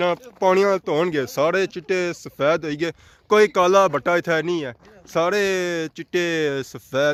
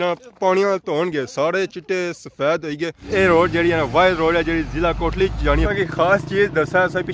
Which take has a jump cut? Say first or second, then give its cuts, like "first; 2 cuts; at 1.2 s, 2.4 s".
second; 2 cuts; at 3.0 s, 5.6 s